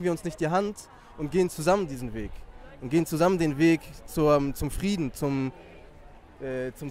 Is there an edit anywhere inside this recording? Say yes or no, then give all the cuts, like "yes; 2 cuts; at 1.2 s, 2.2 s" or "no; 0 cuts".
no; 0 cuts